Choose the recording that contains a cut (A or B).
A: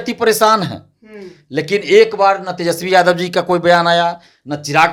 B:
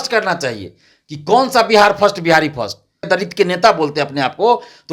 B